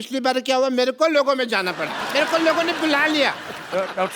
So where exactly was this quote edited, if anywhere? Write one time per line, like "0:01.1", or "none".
0:02.0